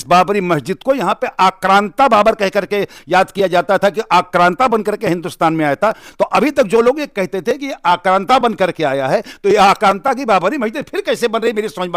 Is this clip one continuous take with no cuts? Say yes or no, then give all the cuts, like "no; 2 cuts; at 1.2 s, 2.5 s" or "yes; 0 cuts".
yes; 0 cuts